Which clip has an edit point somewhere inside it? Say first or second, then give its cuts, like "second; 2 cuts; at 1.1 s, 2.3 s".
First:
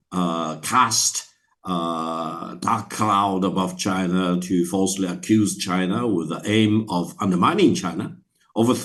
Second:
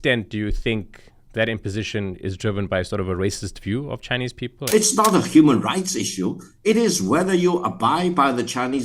second; 1 cut; at 4.7 s